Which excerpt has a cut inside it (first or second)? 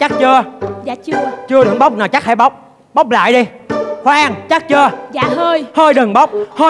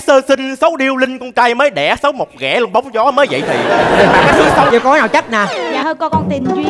second